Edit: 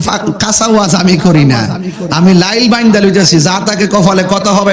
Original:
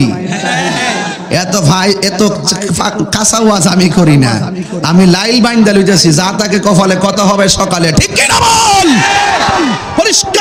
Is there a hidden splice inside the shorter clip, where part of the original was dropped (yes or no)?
no